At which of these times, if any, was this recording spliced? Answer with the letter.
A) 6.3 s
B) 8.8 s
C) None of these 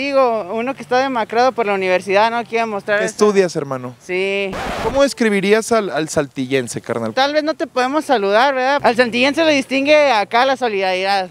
B